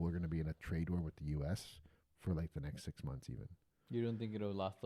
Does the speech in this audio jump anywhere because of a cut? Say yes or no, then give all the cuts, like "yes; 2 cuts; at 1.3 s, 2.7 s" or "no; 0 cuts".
no; 0 cuts